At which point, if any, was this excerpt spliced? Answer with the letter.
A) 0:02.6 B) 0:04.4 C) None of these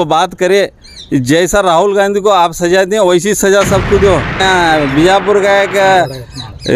B